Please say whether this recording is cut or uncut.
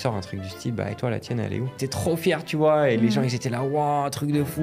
cut